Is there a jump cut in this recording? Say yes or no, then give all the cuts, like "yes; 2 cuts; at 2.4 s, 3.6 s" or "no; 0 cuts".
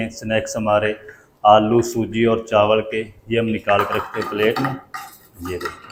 no; 0 cuts